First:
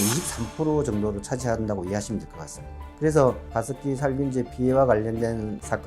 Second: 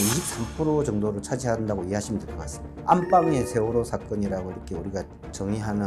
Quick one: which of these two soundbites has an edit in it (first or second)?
second